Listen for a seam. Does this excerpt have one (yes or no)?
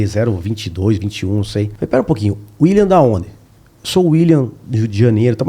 yes